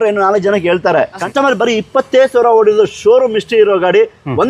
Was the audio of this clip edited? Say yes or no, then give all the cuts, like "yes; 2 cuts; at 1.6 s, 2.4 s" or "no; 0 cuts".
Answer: yes; 1 cut; at 1.2 s